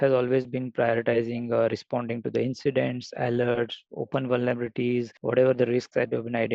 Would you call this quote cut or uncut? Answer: uncut